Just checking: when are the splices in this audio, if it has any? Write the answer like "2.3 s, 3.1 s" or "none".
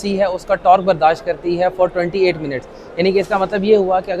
none